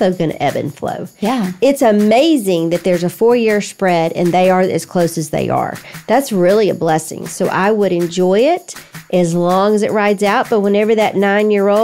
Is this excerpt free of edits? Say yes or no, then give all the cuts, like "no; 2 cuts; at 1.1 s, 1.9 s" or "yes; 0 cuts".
yes; 0 cuts